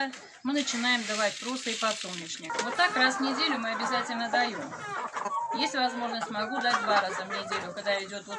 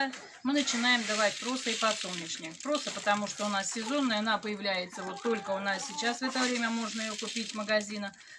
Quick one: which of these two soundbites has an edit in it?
first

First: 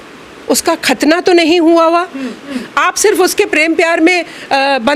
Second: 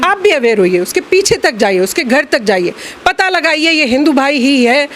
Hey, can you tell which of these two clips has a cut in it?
first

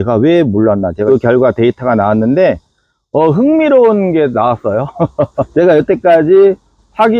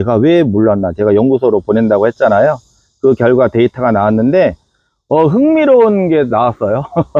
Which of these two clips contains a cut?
first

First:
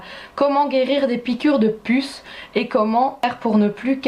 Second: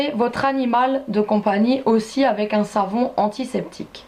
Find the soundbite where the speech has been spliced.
second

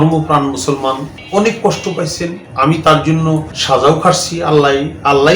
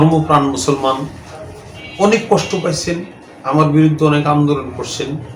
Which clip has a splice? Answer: first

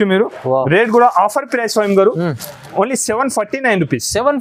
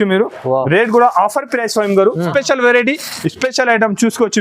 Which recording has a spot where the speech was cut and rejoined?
second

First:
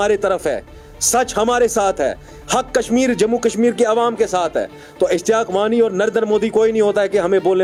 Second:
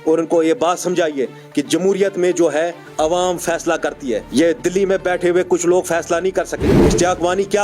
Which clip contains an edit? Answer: second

